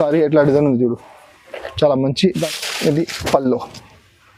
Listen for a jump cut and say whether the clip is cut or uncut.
cut